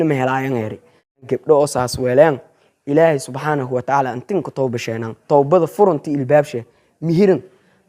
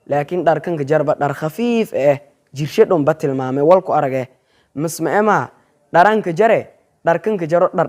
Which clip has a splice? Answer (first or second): first